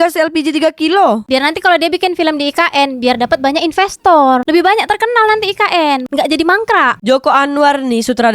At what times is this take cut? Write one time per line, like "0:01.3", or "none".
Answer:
0:01.3